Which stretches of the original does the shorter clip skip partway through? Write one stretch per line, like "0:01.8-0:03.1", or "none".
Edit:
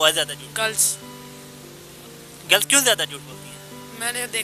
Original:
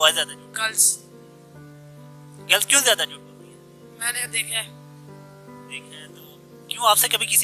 none